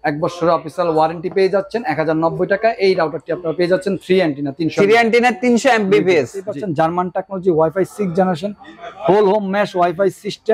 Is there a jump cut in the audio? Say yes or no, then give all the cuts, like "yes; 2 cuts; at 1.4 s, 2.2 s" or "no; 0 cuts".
yes; 1 cut; at 6.6 s